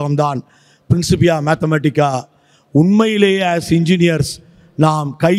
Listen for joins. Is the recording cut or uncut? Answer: uncut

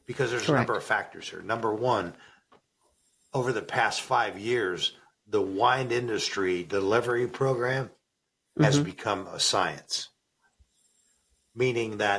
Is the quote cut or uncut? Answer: uncut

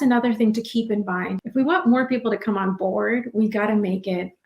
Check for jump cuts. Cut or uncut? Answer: cut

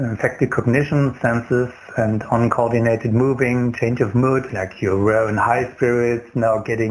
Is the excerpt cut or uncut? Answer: cut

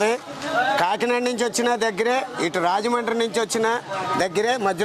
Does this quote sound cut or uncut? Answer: uncut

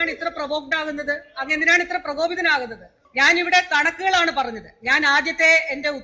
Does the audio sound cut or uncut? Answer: uncut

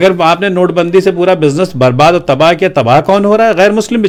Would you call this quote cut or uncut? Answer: uncut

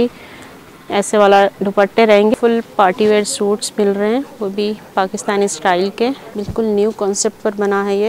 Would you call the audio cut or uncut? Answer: cut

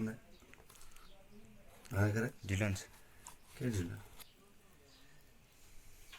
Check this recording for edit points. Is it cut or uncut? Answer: cut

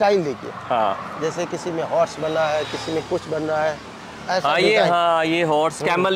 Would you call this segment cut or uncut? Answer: uncut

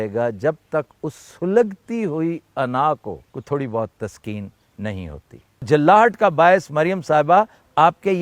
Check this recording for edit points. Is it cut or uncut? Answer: cut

